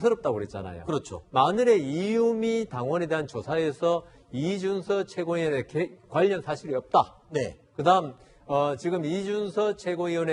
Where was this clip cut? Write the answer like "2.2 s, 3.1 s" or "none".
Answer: none